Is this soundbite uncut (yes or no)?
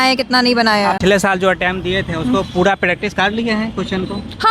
no